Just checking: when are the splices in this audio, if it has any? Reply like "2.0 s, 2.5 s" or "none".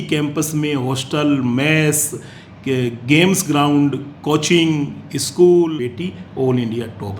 5.9 s